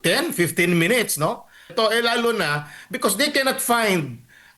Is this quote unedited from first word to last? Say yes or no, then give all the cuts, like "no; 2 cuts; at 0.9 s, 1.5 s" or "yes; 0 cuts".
no; 1 cut; at 1.7 s